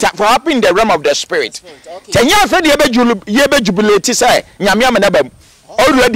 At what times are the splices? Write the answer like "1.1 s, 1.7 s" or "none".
none